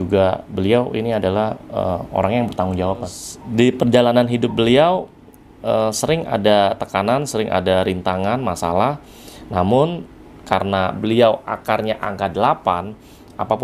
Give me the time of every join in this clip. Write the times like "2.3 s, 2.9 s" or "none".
3.2 s